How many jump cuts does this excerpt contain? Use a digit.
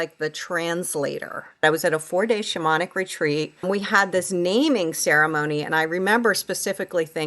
2